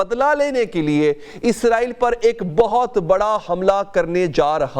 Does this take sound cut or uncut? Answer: uncut